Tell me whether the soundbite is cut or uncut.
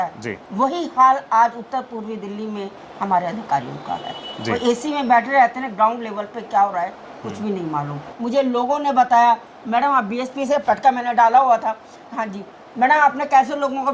cut